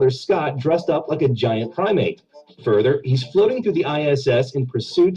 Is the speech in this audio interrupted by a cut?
no; 0 cuts

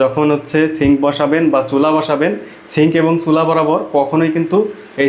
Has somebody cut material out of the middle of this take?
no; 0 cuts

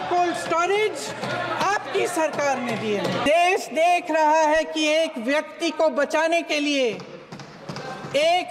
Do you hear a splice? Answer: yes; 1 cut; at 3.2 s

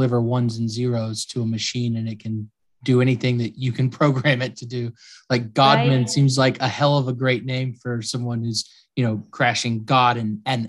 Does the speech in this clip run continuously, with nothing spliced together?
yes; 0 cuts

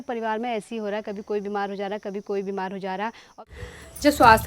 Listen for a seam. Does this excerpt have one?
yes; 1 cut; at 3.4 s

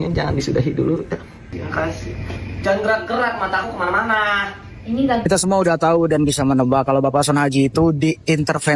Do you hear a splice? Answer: yes; 1 cut; at 5.3 s

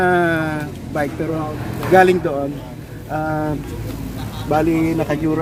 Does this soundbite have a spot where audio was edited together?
no; 0 cuts

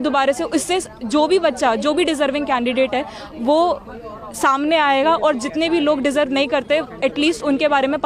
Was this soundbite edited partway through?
no; 0 cuts

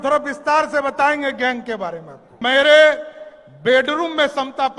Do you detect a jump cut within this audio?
yes; 1 cut; at 2.4 s

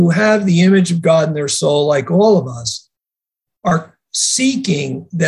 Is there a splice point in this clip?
no; 0 cuts

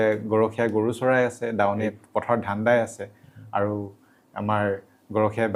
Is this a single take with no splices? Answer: yes; 0 cuts

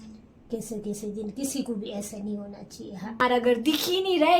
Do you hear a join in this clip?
yes; 1 cut; at 3.2 s

